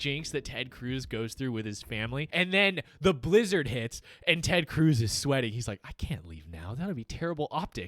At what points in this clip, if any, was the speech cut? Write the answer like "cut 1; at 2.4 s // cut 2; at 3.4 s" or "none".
cut 1; at 2.3 s